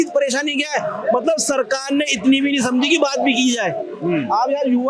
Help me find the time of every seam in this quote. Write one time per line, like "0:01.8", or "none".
none